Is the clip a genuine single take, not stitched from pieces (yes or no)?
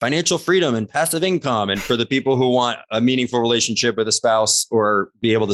yes